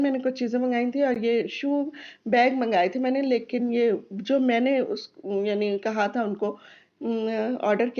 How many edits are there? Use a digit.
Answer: 0